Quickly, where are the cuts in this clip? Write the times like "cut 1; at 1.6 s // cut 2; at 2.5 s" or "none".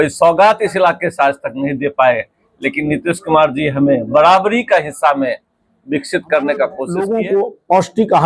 cut 1; at 6.9 s